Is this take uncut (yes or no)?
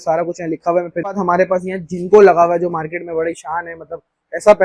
no